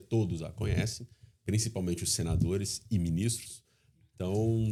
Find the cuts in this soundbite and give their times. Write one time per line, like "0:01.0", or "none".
none

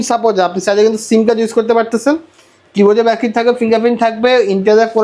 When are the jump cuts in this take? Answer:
none

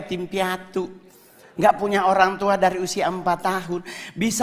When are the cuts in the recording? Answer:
none

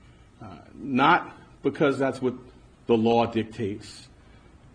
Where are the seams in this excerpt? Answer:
0:01.9

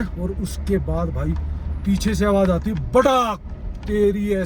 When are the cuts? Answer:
none

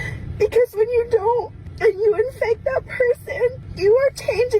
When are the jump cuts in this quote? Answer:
0:01.6
0:03.7

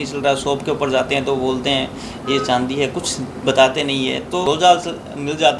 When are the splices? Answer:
0:04.5

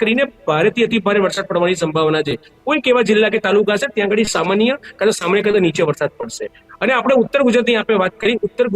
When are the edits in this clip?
none

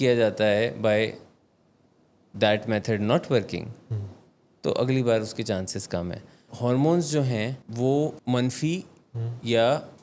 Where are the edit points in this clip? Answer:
0:06.5
0:07.6
0:08.2

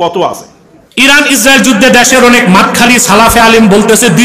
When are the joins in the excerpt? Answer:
0:00.9

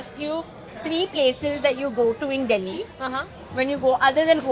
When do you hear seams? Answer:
none

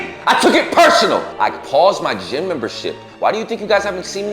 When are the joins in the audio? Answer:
0:01.3

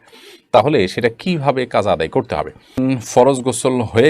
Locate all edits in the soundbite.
0:02.8

